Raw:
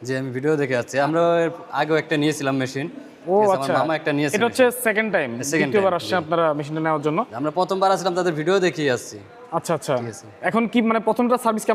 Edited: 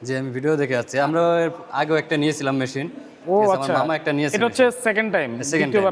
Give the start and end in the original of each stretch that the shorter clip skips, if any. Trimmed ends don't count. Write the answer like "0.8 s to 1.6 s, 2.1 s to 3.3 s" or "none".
none